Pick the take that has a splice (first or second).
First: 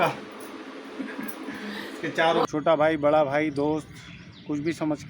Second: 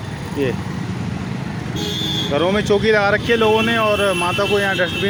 first